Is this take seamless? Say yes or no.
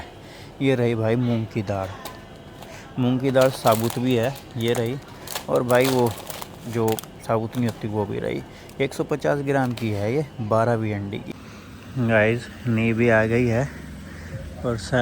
no